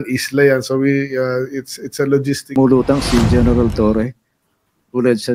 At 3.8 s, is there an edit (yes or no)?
no